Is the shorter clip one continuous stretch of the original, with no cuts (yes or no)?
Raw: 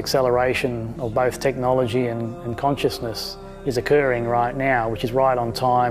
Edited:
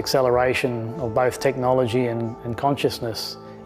yes